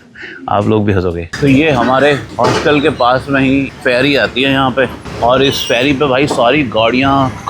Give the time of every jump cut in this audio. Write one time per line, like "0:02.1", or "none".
0:01.3
0:02.3
0:03.7
0:05.0